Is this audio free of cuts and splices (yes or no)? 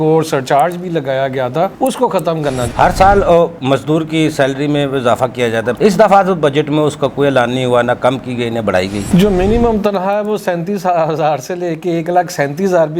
no